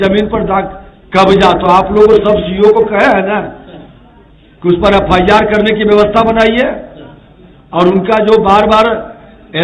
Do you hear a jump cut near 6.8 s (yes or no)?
no